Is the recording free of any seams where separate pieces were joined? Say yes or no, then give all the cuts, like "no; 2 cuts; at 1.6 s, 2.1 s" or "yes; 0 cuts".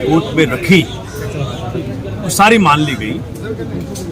yes; 0 cuts